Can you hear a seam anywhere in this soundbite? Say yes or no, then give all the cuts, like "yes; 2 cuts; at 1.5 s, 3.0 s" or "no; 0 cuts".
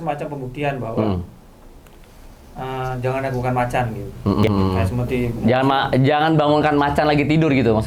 no; 0 cuts